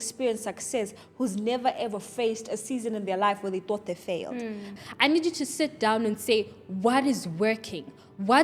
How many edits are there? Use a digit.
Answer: 1